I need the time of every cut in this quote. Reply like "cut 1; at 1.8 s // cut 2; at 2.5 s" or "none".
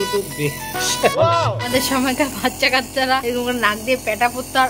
cut 1; at 3.2 s